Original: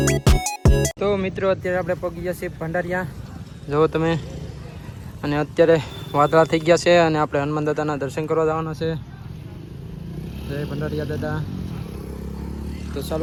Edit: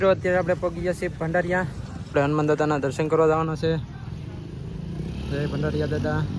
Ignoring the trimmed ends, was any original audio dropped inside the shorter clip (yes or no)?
yes